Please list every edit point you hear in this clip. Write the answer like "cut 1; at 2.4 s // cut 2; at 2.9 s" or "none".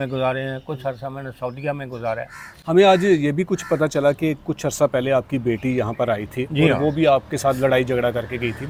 none